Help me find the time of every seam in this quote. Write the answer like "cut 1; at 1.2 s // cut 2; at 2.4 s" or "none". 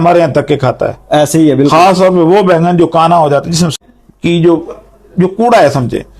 cut 1; at 3.7 s